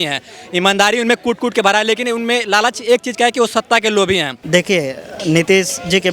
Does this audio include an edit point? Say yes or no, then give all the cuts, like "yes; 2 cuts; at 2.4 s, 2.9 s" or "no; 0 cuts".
yes; 1 cut; at 4.3 s